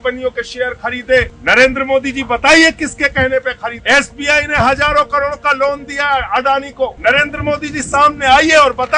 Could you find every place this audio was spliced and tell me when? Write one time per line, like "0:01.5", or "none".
0:01.3
0:03.8
0:07.0

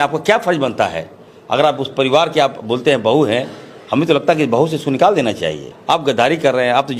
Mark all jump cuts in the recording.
0:05.7

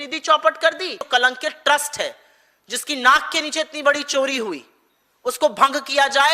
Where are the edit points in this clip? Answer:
0:01.0

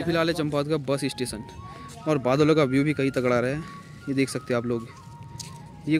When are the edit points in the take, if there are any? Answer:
none

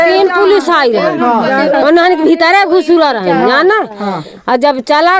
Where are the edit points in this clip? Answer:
none

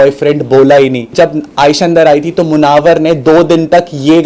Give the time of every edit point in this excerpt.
0:01.1

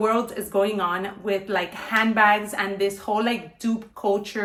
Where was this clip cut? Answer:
none

